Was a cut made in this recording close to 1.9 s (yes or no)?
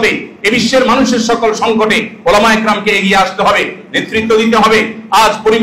no